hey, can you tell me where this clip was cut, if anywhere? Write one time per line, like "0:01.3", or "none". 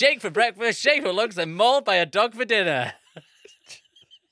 none